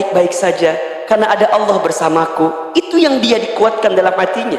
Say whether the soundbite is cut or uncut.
uncut